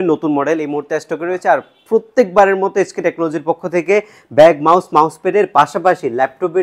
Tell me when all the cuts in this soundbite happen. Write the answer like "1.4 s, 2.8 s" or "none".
none